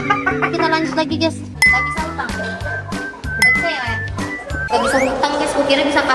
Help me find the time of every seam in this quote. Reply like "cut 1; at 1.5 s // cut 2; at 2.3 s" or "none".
cut 1; at 1.5 s